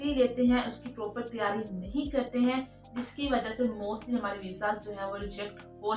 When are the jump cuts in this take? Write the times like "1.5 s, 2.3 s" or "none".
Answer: none